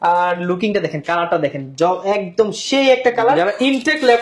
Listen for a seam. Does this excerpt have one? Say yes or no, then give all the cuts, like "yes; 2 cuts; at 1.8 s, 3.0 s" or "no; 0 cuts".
no; 0 cuts